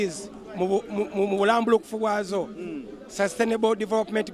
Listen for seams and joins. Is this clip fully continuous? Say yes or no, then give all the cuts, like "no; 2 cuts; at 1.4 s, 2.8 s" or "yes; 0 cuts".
yes; 0 cuts